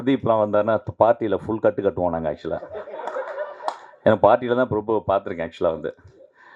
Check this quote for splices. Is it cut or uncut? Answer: uncut